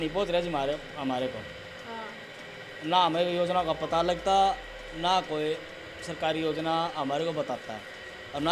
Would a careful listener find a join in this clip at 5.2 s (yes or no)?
no